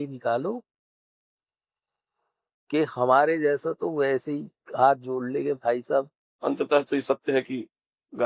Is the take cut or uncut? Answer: cut